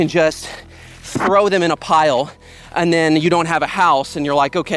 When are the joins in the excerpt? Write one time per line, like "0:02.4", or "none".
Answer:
none